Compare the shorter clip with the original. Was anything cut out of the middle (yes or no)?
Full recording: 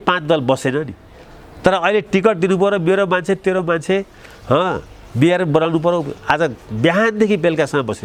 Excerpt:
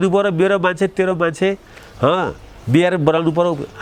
no